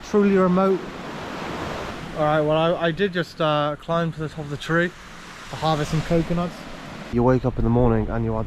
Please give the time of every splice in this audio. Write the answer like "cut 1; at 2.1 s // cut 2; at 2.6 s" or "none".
cut 1; at 1.9 s // cut 2; at 7.1 s